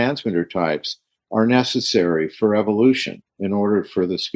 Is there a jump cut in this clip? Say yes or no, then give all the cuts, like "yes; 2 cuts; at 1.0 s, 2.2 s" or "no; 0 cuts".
no; 0 cuts